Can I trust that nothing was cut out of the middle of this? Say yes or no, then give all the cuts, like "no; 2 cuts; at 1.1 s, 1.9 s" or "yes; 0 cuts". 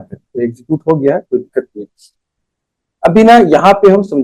yes; 0 cuts